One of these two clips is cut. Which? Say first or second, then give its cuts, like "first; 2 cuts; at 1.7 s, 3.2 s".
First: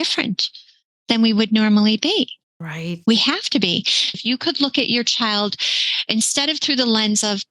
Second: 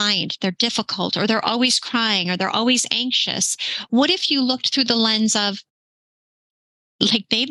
first; 1 cut; at 4.2 s